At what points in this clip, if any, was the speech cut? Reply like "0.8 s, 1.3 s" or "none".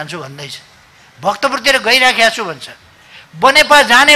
none